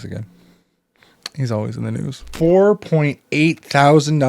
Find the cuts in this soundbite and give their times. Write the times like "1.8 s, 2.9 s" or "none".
2.3 s